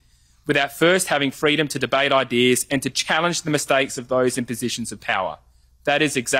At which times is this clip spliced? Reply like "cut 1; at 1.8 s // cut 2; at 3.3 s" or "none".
none